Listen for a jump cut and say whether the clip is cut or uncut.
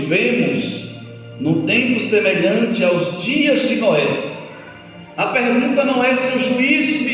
uncut